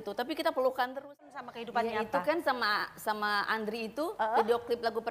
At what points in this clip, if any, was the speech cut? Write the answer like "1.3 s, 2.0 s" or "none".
1.2 s